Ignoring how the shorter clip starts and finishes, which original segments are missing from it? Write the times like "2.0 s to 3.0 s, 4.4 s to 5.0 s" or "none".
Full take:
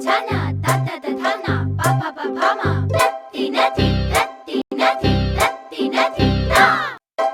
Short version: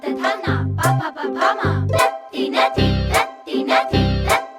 4.6 s to 4.7 s